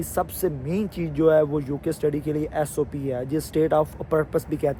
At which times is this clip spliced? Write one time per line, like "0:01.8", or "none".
none